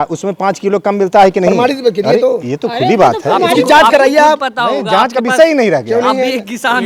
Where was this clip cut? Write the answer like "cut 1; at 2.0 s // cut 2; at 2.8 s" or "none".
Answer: none